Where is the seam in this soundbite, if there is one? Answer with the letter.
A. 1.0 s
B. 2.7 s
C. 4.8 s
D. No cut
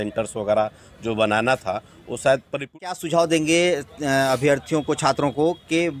B